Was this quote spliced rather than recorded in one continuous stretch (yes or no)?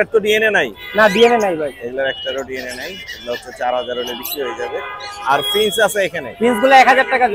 no